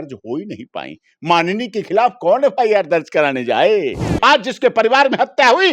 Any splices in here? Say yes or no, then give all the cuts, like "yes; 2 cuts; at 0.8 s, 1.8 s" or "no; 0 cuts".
yes; 1 cut; at 4.1 s